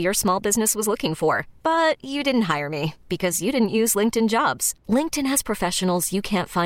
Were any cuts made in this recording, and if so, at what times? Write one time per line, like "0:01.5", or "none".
none